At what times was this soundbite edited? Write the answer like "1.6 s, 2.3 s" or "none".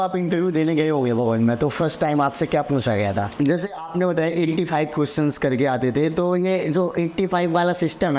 3.3 s